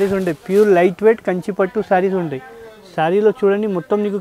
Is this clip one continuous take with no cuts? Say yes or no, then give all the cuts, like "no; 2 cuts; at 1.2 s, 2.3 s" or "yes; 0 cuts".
yes; 0 cuts